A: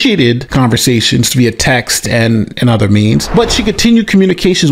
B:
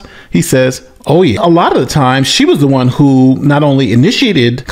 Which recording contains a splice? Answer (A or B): B